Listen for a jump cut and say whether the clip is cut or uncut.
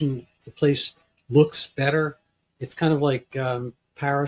uncut